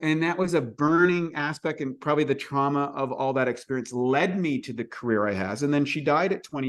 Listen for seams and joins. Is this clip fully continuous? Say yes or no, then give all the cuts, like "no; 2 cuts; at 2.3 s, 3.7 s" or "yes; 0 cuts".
yes; 0 cuts